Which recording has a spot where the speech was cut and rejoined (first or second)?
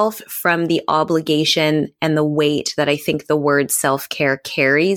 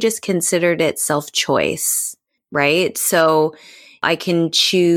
second